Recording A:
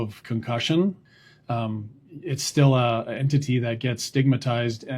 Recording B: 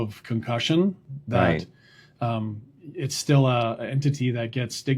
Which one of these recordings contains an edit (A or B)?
A